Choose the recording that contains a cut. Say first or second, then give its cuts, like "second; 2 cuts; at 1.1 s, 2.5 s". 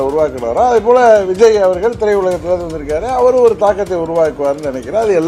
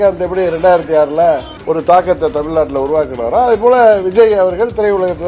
second; 1 cut; at 1.5 s